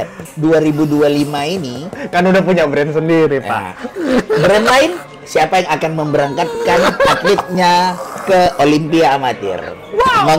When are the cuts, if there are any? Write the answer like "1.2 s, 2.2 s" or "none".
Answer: none